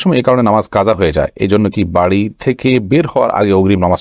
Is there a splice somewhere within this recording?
no; 0 cuts

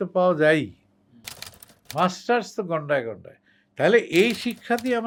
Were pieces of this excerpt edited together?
no; 0 cuts

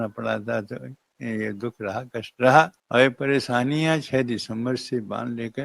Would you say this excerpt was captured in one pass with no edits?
no; 1 cut; at 2.8 s

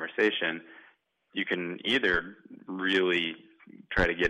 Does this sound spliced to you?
no; 0 cuts

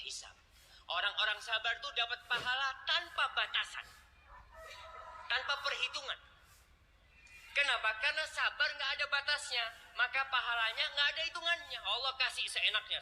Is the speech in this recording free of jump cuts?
yes; 0 cuts

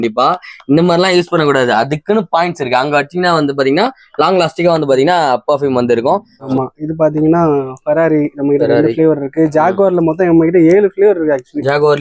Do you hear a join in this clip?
yes; 1 cut; at 6.4 s

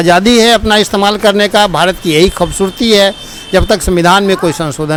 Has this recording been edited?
no; 0 cuts

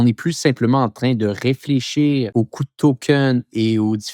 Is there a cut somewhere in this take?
yes; 1 cut; at 2.3 s

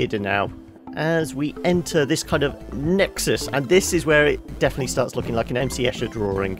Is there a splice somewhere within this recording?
yes; 1 cut; at 5.6 s

